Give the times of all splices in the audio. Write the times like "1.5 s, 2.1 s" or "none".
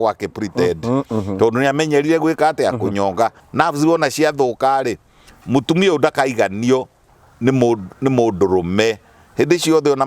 3.4 s